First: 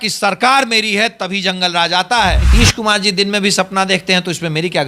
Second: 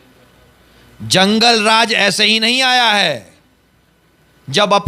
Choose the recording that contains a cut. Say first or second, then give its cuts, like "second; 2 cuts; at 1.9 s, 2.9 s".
first; 1 cut; at 2.4 s